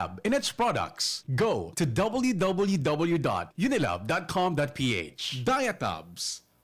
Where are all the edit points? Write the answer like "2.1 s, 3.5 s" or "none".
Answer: 5.3 s